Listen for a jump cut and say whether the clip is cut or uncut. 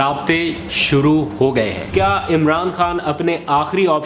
cut